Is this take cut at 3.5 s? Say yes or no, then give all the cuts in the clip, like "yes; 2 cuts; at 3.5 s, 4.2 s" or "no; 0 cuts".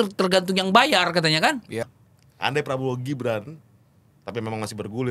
no; 1 cut; at 1.8 s